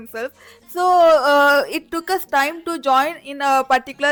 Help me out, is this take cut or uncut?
uncut